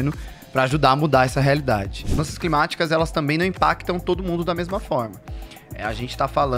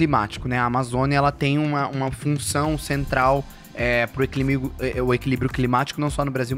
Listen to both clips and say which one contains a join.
first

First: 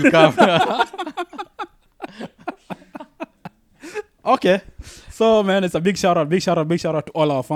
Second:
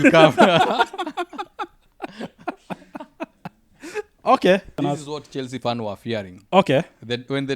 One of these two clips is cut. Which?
second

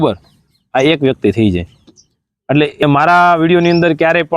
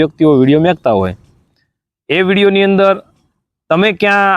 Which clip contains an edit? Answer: first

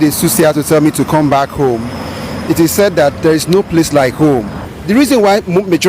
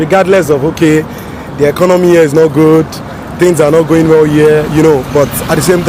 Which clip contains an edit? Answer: first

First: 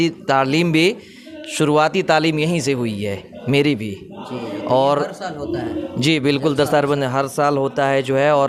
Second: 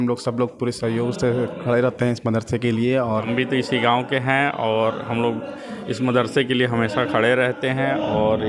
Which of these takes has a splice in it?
second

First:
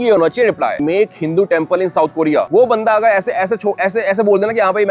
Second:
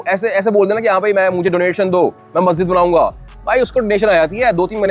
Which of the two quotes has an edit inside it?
first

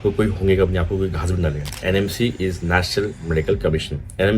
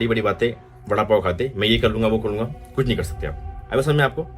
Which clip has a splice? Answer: first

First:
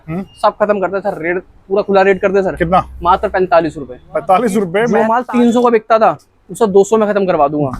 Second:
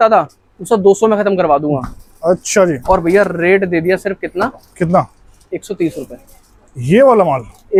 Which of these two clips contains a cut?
first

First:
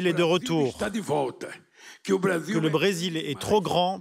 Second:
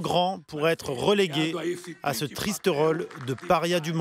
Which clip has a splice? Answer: first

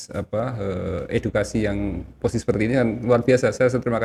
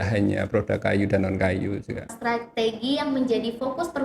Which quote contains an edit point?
second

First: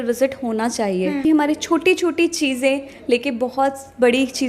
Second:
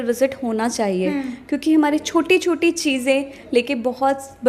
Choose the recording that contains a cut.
first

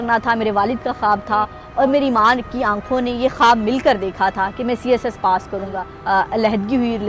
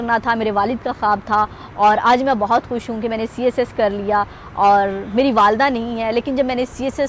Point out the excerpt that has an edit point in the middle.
first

